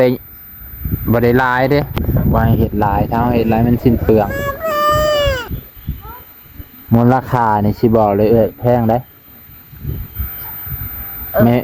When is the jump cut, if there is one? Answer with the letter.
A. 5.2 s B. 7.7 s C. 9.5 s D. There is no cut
A